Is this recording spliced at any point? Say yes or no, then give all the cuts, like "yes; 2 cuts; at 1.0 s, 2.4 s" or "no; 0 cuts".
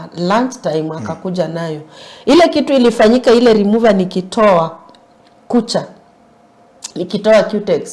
no; 0 cuts